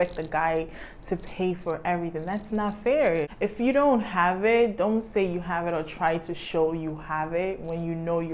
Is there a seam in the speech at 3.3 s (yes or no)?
yes